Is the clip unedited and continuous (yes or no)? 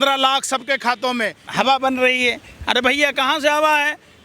no